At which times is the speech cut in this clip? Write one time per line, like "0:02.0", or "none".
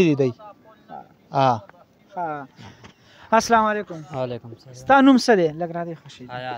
none